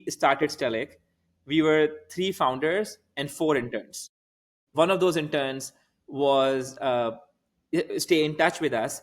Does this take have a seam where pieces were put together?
yes; 1 cut; at 4.7 s

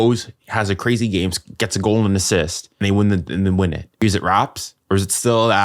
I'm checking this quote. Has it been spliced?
yes; 2 cuts; at 2.8 s, 4.0 s

